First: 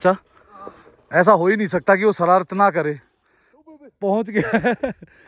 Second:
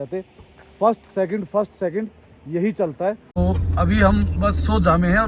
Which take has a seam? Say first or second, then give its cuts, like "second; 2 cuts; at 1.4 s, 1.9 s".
second; 1 cut; at 3.3 s